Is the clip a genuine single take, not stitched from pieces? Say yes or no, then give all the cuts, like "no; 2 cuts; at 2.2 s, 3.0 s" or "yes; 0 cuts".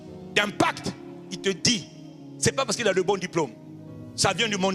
yes; 0 cuts